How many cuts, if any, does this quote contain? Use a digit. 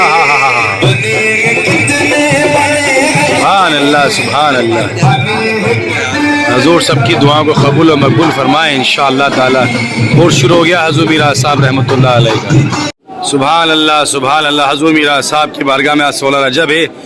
0